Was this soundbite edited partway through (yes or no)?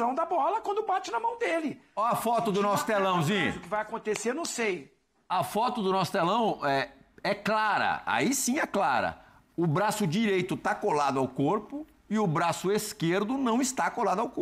no